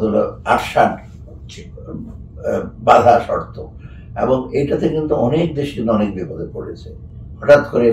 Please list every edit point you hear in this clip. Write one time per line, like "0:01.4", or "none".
none